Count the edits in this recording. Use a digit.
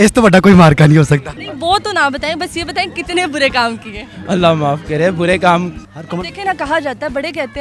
2